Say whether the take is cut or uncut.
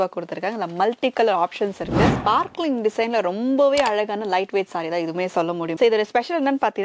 cut